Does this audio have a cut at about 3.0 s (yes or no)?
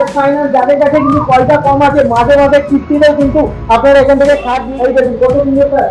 no